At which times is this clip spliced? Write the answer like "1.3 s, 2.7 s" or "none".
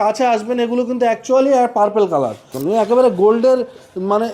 2.5 s